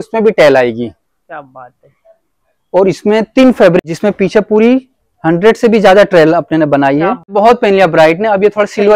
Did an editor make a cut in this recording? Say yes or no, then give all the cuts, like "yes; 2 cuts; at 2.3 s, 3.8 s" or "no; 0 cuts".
yes; 2 cuts; at 3.8 s, 7.3 s